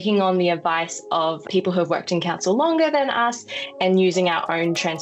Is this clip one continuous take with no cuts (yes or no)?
no